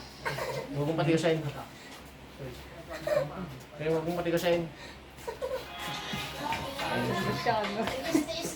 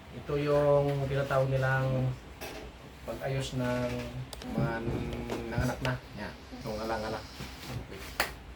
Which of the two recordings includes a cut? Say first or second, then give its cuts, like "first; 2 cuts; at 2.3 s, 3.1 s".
second; 2 cuts; at 4.4 s, 6.5 s